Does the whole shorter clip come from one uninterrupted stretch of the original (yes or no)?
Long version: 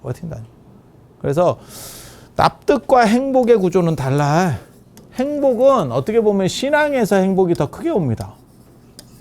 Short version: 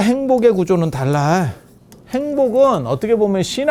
yes